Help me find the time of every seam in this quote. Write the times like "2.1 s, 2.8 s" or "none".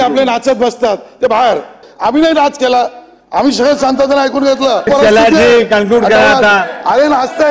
1.8 s, 4.9 s